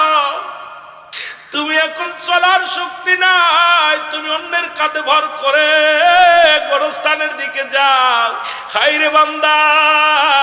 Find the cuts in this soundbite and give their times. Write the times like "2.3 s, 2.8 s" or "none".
8.5 s